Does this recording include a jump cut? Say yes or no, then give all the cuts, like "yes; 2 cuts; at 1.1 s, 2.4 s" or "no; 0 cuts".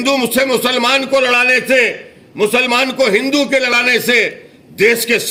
no; 0 cuts